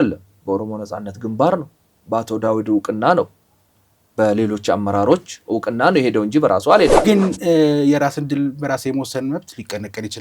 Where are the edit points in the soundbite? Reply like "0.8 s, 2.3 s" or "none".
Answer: 7.0 s